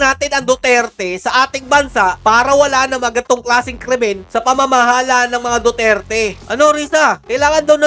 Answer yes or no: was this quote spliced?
yes